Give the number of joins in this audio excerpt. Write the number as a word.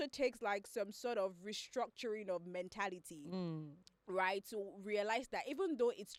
zero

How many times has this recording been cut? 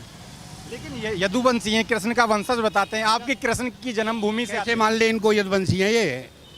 zero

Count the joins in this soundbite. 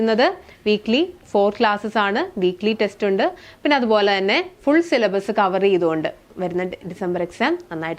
zero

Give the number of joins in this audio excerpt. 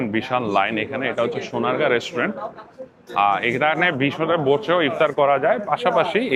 zero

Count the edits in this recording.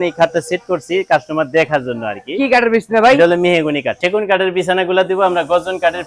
one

